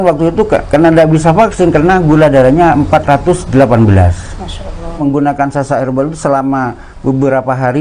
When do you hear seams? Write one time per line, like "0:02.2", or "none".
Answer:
0:05.0